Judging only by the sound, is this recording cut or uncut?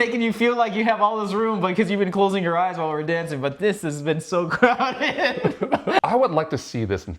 cut